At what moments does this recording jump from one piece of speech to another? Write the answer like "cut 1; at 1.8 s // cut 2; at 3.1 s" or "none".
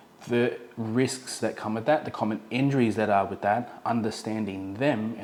none